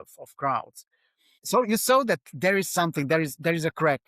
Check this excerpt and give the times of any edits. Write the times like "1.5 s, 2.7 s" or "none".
1.4 s

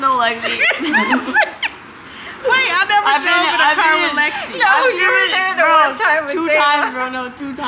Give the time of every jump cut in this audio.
none

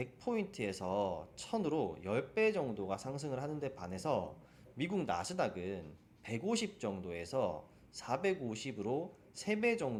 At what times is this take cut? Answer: none

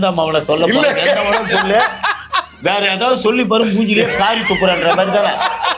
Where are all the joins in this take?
none

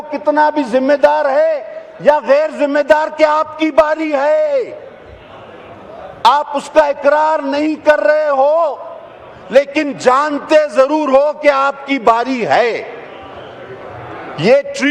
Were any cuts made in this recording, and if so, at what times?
none

